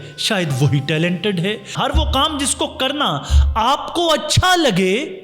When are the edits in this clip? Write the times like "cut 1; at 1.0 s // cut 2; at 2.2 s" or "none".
cut 1; at 1.7 s